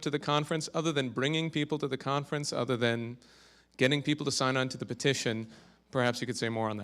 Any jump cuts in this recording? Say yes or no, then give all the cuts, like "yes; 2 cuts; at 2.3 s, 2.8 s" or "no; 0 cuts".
yes; 1 cut; at 0.9 s